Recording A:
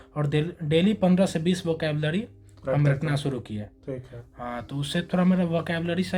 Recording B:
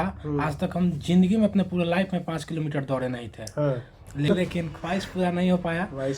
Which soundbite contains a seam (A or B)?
B